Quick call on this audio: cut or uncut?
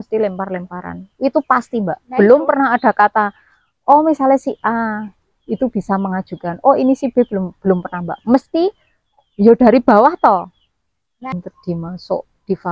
cut